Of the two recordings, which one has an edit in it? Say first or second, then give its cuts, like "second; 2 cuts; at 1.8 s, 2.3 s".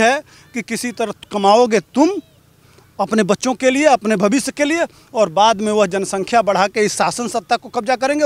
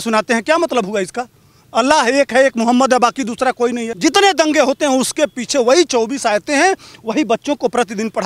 second; 1 cut; at 3.9 s